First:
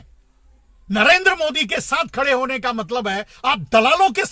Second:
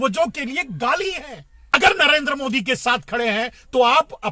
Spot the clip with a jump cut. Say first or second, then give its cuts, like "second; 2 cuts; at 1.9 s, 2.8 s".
second; 1 cut; at 1.7 s